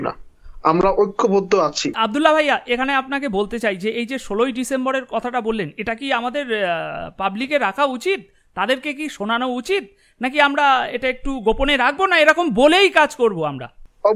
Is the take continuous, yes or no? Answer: no